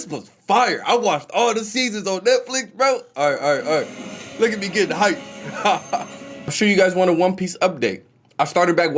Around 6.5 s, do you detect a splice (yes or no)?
yes